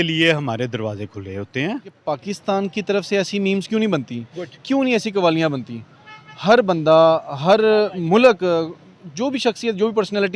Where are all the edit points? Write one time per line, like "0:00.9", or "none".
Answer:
0:02.2

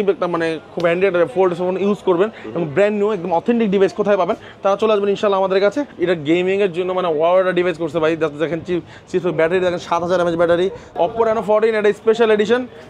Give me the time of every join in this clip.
0:05.9
0:10.8

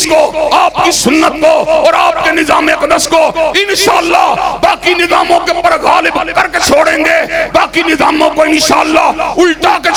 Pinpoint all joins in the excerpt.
none

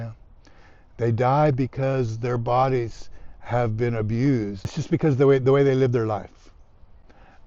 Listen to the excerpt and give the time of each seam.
0:04.8

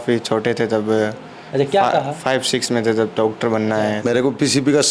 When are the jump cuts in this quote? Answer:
0:04.0

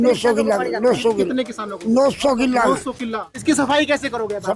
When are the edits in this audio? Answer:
0:03.3

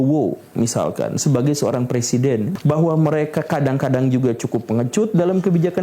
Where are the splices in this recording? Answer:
0:02.5

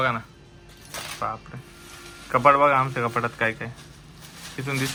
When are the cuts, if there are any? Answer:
none

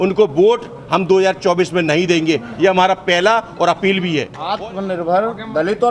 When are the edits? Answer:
0:04.4

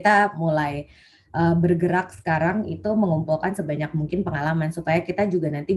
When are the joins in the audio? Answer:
none

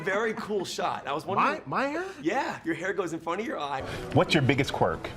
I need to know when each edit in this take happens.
0:03.9

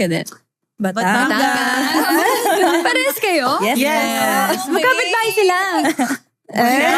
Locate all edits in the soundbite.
none

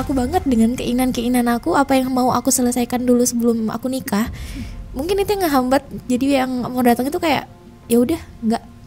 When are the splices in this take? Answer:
none

